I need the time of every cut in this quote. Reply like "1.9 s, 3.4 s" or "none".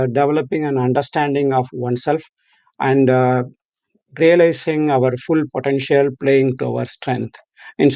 none